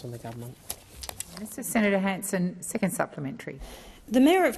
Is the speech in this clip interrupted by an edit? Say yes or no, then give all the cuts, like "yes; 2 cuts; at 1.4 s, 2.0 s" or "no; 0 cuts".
yes; 1 cut; at 1.5 s